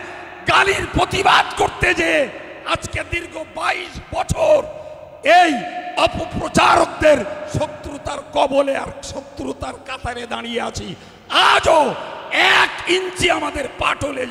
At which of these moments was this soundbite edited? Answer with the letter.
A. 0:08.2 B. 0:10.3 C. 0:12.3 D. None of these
D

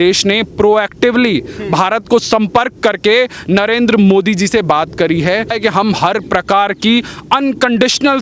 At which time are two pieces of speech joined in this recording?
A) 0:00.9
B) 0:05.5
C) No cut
B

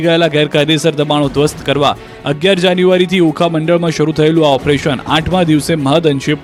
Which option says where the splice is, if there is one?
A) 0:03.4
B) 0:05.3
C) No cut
C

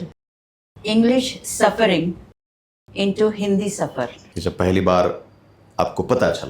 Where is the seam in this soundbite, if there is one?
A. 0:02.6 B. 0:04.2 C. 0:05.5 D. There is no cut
B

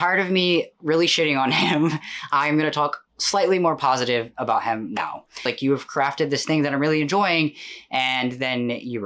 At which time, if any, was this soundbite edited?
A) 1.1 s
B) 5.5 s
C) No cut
B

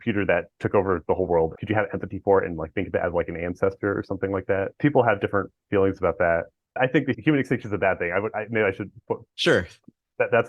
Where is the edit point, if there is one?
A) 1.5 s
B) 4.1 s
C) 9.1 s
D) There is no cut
A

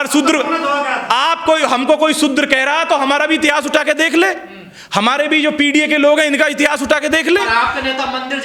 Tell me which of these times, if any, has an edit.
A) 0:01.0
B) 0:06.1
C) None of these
C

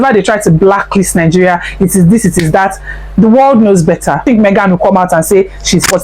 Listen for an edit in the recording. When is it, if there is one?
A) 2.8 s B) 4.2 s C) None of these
B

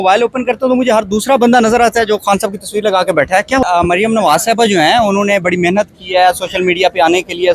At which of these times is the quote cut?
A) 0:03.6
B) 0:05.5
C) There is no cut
A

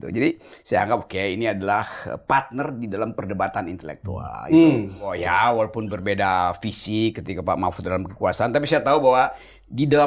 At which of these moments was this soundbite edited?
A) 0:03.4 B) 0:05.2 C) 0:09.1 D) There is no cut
B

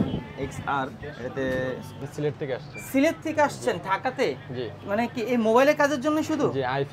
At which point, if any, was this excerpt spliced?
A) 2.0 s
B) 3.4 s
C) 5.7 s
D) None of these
A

